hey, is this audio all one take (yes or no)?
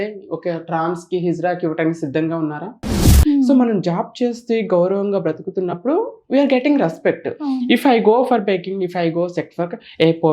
no